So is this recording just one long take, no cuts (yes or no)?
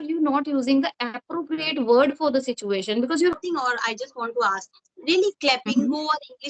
no